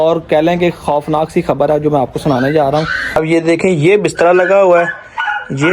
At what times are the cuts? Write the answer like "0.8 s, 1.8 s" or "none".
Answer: 3.1 s